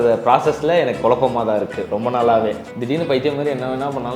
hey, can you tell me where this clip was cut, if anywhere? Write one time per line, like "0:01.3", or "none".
0:02.7